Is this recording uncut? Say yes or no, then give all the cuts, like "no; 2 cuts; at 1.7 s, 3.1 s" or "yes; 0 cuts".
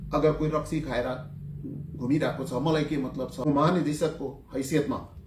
no; 1 cut; at 3.3 s